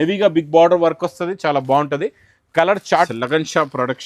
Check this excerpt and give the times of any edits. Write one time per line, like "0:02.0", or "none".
0:03.1